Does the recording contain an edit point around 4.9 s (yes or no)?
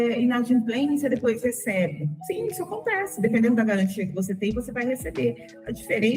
no